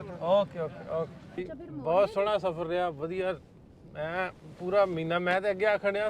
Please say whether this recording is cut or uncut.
cut